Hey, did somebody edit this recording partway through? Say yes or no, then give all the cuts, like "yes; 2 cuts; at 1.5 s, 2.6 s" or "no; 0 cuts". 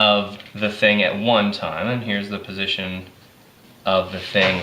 yes; 1 cut; at 1.9 s